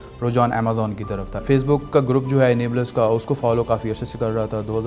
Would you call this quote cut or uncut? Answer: cut